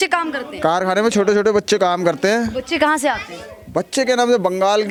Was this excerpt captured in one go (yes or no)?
yes